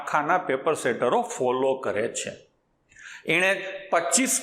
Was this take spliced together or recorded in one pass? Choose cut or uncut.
uncut